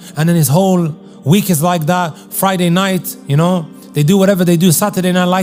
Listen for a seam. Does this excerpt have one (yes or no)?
no